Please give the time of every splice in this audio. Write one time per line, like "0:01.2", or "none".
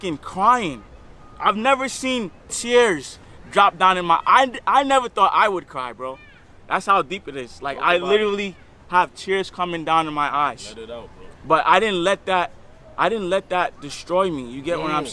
none